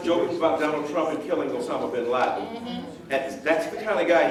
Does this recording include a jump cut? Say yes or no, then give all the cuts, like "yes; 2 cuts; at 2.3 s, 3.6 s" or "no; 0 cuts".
no; 0 cuts